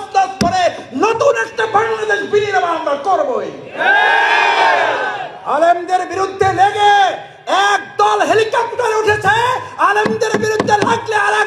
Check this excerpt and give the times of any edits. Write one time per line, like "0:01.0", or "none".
none